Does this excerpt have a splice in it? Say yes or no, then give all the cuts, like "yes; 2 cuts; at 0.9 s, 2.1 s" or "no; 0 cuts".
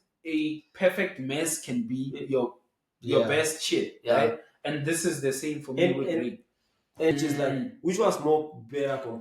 yes; 1 cut; at 7.1 s